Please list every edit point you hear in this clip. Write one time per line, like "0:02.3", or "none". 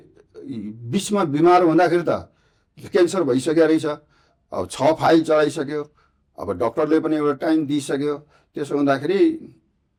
none